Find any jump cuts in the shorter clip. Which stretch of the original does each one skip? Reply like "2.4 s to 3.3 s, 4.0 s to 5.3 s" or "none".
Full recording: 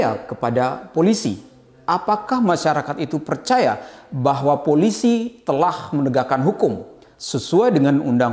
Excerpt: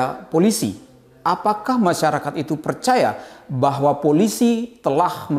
none